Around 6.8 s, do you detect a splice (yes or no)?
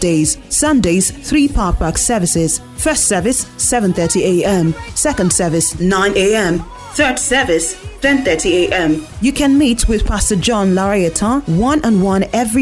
no